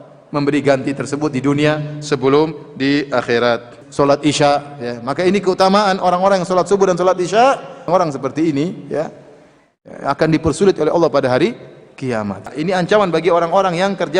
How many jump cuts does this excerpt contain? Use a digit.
3